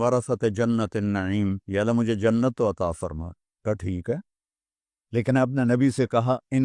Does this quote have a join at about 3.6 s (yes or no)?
yes